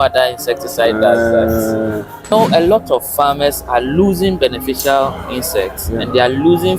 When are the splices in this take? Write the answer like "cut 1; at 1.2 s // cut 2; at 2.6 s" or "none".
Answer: cut 1; at 2.3 s